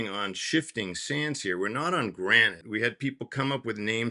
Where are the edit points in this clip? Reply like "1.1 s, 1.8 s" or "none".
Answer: 2.6 s